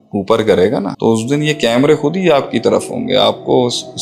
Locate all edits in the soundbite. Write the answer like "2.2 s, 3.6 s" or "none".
0.9 s